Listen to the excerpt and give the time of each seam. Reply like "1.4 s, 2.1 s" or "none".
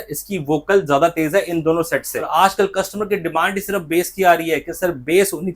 2.2 s